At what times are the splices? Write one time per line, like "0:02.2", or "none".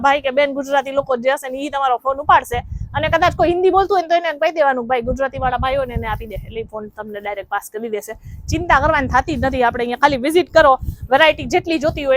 none